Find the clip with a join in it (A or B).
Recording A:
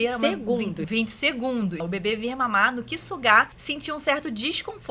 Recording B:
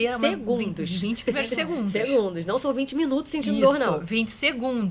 A